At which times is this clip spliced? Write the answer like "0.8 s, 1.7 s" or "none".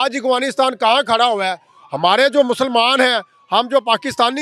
none